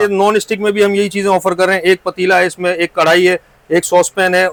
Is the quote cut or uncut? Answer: uncut